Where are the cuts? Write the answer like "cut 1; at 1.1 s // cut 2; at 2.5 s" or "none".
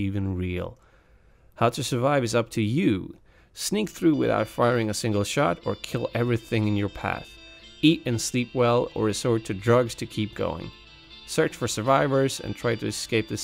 cut 1; at 7.3 s